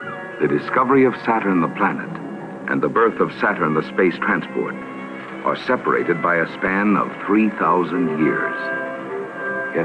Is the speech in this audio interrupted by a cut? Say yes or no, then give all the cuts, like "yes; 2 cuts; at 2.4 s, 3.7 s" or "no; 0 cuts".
no; 0 cuts